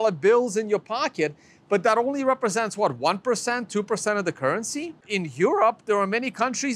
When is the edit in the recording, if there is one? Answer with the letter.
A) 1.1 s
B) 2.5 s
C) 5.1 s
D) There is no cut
C